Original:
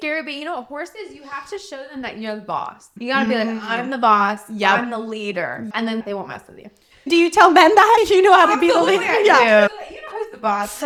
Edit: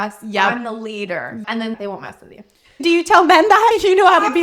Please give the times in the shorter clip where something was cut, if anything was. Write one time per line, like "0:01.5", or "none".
none

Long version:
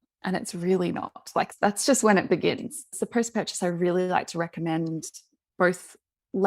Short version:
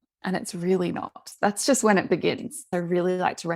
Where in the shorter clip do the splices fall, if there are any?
0:01.3
0:02.6

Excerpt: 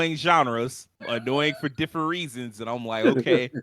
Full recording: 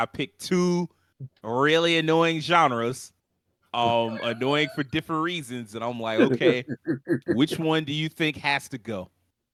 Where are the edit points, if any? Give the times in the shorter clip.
0:01.0

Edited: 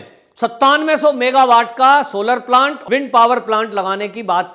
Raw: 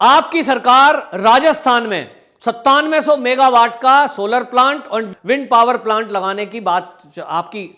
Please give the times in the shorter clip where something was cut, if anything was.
0:02.8

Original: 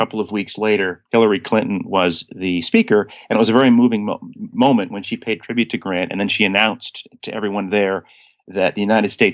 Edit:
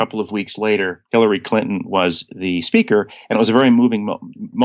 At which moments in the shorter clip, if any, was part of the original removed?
none

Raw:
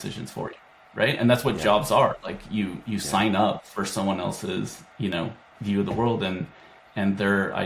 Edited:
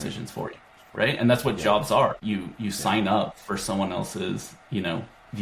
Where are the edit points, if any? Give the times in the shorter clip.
0:02.2

